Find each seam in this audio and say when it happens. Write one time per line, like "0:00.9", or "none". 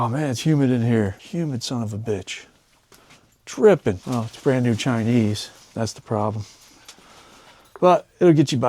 0:01.2
0:04.0